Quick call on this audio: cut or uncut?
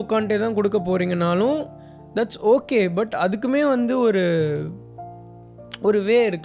uncut